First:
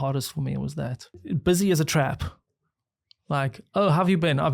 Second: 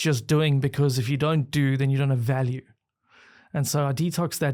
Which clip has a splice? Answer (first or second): first